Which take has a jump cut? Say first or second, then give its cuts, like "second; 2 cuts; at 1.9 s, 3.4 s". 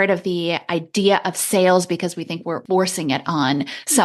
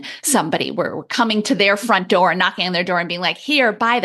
first; 1 cut; at 2.6 s